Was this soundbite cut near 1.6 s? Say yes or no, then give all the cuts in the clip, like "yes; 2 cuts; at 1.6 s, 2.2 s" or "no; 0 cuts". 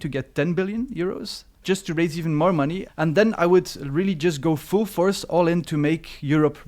yes; 1 cut; at 1.6 s